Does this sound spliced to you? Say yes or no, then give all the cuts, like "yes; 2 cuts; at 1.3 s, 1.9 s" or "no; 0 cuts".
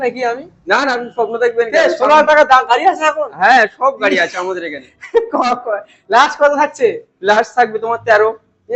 no; 0 cuts